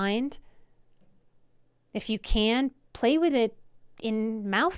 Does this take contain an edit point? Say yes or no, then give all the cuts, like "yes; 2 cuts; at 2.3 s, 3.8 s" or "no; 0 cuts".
no; 0 cuts